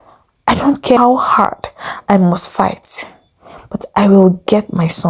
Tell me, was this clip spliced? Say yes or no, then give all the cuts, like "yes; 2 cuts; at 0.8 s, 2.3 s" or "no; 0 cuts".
yes; 1 cut; at 1.0 s